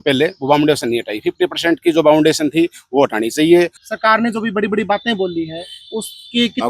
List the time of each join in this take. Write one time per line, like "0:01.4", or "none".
0:03.8